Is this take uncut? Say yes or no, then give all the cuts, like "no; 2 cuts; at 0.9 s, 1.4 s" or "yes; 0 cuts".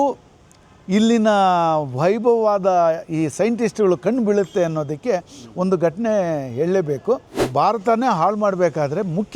no; 1 cut; at 7.5 s